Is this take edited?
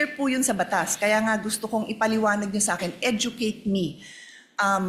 no; 0 cuts

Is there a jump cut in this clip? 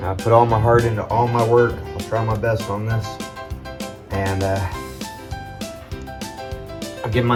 no; 0 cuts

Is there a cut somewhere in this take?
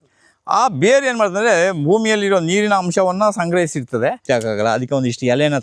yes; 1 cut; at 4.2 s

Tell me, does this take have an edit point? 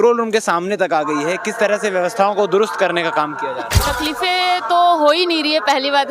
yes; 1 cut; at 3.7 s

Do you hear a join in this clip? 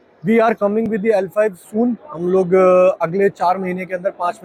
no; 0 cuts

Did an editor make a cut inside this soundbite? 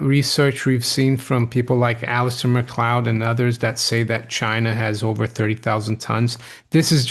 no; 0 cuts

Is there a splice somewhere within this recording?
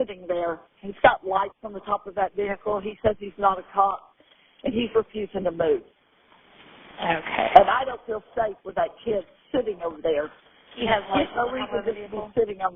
no; 0 cuts

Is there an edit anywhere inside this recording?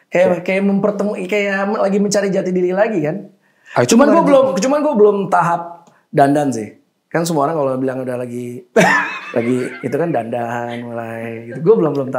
no; 0 cuts

